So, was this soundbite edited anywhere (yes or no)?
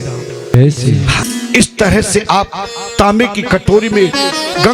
yes